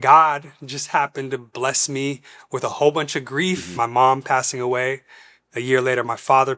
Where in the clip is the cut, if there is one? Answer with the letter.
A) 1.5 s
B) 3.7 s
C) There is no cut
B